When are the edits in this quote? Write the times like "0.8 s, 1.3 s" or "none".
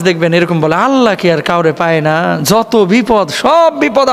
none